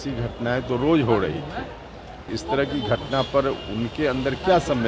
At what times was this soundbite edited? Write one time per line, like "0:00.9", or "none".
0:02.3